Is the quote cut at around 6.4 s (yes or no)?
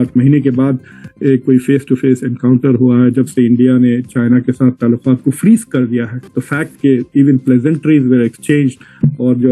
yes